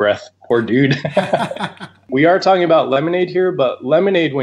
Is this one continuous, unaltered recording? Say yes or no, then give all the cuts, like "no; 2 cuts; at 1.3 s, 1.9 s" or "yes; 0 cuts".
no; 1 cut; at 2.0 s